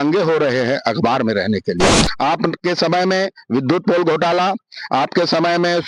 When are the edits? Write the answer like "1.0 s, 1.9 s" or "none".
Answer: 2.0 s